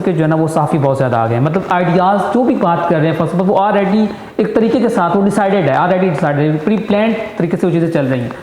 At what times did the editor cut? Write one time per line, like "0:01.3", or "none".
none